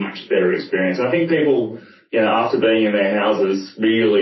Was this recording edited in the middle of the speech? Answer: no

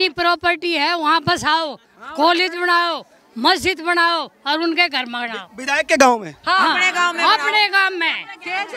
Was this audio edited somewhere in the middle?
no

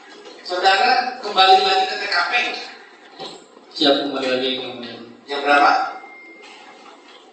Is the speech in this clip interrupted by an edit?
no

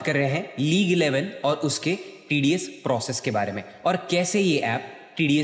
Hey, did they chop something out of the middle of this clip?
no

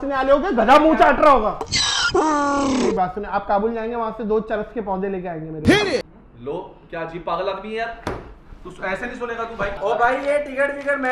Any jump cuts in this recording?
yes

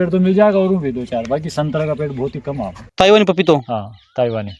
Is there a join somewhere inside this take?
yes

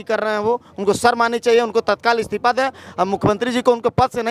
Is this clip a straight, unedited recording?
yes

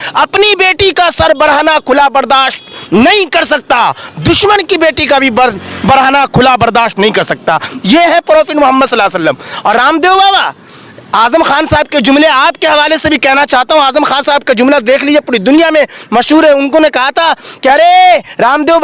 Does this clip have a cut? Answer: no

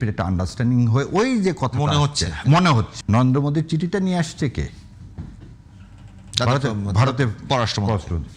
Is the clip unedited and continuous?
yes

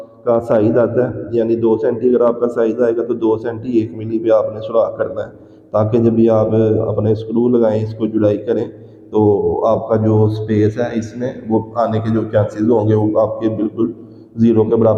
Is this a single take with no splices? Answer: yes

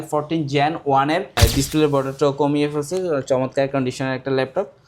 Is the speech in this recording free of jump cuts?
no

